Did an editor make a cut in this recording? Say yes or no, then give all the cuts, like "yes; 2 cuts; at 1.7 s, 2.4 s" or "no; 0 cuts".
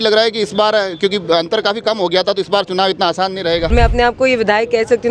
yes; 1 cut; at 3.7 s